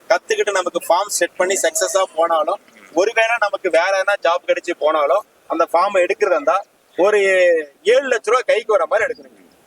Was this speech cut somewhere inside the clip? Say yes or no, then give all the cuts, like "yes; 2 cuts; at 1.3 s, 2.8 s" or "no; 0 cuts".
no; 0 cuts